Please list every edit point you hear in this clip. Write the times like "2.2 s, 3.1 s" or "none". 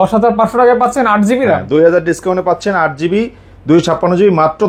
none